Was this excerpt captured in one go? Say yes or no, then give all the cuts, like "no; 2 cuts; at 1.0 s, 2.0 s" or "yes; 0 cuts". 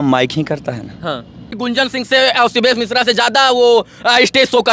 no; 1 cut; at 1.5 s